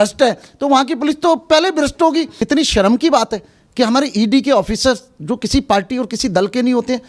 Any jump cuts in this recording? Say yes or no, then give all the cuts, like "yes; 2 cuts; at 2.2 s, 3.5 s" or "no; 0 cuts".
yes; 1 cut; at 2.4 s